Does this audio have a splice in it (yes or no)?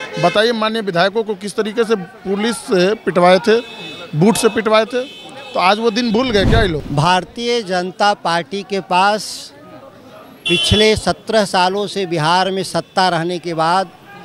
yes